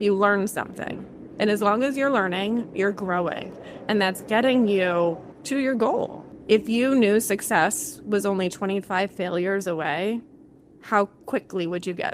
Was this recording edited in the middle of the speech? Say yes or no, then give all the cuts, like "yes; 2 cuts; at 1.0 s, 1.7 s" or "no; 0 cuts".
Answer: yes; 2 cuts; at 5.3 s, 6.3 s